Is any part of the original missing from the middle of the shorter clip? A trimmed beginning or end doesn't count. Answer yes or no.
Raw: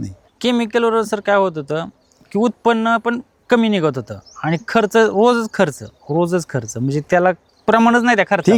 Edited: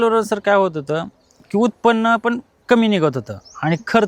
no